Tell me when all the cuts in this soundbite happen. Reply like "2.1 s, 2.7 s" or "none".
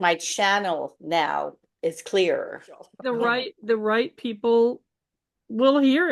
2.9 s